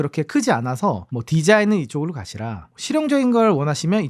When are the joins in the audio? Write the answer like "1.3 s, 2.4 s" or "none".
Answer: 1.1 s